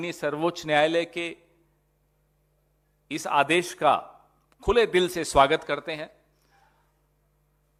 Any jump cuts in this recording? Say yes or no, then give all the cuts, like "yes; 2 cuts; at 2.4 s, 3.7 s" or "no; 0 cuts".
no; 0 cuts